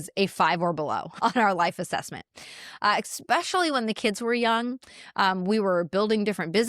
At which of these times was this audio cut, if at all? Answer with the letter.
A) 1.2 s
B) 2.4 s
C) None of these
A